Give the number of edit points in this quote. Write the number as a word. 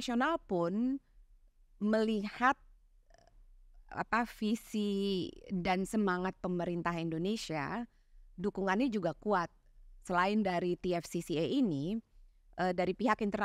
zero